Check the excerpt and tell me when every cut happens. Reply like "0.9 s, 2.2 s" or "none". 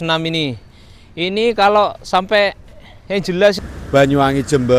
3.6 s